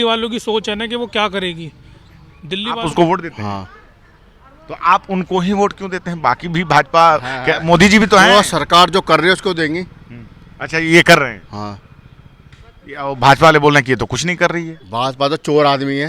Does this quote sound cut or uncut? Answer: cut